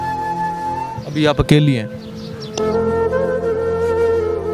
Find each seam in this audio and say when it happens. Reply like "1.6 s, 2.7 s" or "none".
1.0 s